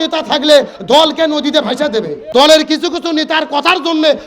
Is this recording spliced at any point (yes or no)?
yes